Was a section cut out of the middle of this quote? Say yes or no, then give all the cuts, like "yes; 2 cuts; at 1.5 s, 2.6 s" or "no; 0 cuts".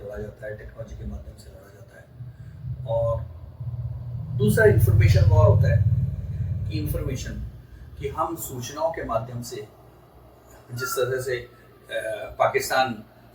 no; 0 cuts